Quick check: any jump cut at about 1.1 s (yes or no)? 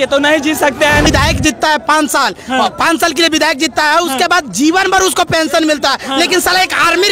yes